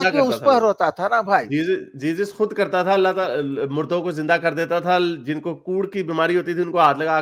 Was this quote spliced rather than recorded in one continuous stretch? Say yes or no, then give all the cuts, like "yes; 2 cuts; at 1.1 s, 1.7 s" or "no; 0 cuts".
no; 0 cuts